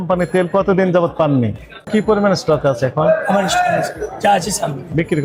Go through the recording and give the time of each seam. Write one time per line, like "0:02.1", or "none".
0:01.9